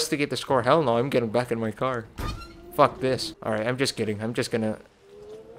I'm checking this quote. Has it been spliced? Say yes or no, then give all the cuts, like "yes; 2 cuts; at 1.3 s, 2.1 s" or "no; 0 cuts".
no; 0 cuts